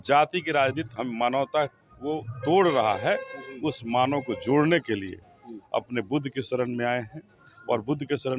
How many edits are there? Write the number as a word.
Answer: zero